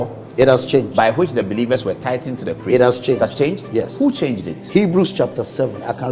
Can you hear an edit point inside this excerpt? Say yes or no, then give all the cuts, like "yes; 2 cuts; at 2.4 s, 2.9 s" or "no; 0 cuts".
no; 0 cuts